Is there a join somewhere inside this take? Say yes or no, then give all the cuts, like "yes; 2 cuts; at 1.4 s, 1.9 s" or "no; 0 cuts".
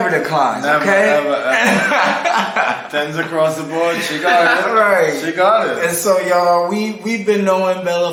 no; 0 cuts